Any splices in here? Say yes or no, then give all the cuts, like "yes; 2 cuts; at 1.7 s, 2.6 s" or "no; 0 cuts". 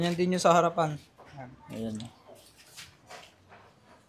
no; 0 cuts